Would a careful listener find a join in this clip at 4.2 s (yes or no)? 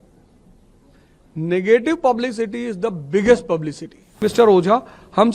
yes